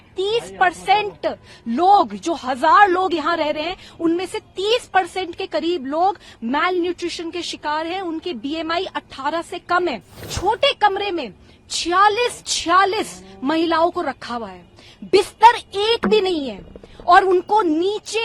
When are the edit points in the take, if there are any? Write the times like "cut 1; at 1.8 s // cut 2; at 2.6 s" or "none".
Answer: cut 1; at 10.3 s